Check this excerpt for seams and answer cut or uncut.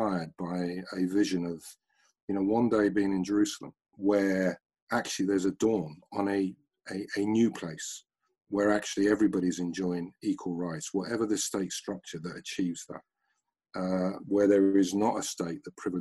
cut